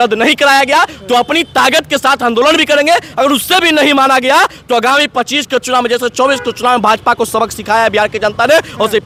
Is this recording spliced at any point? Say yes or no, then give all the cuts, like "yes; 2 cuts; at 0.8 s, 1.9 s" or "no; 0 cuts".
no; 0 cuts